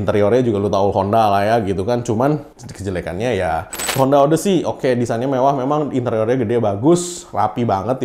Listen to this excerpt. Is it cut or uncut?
cut